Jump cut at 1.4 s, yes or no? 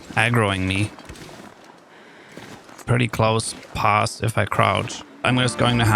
no